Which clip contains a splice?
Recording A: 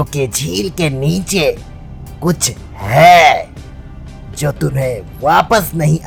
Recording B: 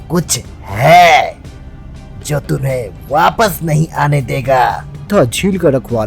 B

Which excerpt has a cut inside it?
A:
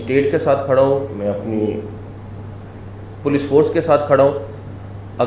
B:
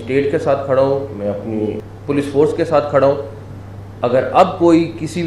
B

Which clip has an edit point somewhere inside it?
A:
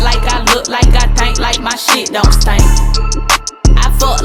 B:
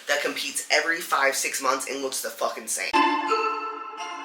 B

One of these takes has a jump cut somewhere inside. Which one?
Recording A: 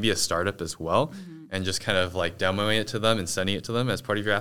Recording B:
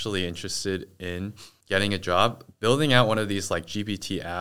B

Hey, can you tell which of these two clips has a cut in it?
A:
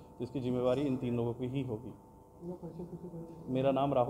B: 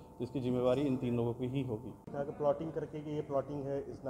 B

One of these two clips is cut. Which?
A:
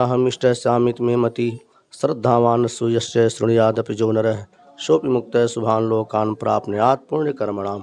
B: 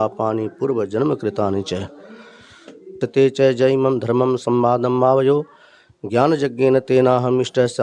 B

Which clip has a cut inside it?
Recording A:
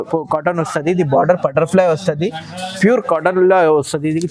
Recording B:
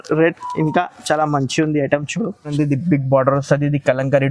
B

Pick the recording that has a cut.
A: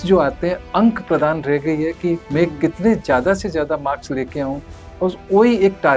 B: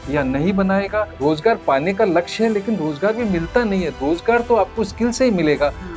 B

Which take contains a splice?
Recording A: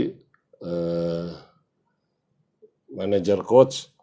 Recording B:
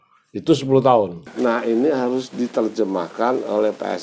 B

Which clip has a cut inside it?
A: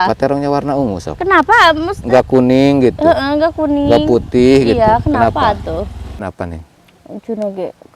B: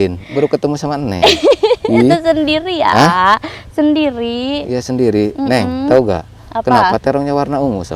A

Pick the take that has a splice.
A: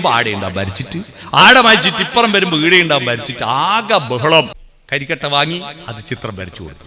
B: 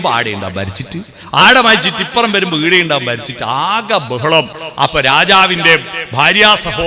A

